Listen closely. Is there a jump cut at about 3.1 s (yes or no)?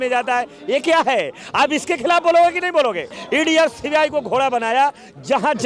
yes